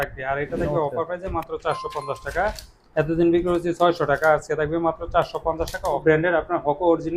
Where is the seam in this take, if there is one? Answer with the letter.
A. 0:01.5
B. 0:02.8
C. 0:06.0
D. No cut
C